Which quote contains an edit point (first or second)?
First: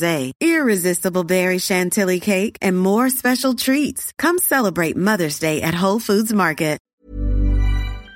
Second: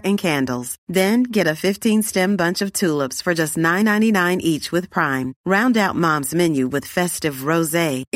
first